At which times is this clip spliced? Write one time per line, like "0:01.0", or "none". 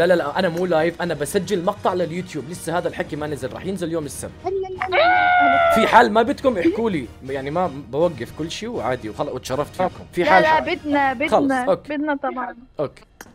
none